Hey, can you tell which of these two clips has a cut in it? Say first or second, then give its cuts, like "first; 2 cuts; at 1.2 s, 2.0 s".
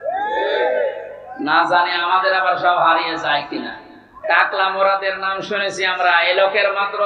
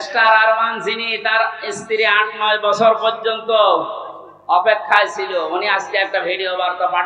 first; 1 cut; at 4.2 s